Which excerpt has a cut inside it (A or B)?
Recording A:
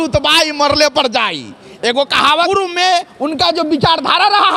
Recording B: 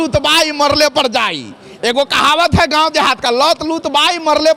A